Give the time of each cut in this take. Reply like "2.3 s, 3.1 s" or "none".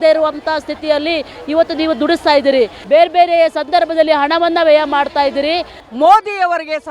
2.8 s, 5.8 s